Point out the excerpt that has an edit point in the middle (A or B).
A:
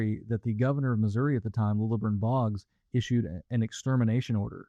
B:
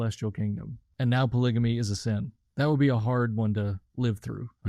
B